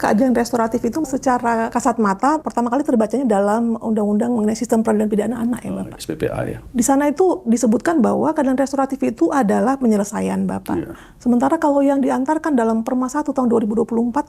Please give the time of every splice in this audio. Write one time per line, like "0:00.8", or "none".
0:01.2
0:02.5
0:06.6